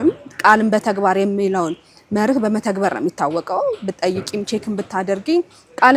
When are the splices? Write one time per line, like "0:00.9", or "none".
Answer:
none